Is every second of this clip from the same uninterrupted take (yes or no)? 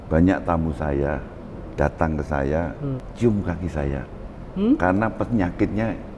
no